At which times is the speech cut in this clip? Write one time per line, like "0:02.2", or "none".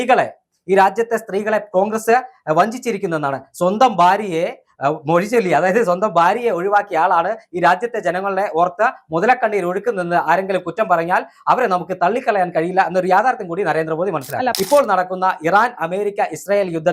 0:14.5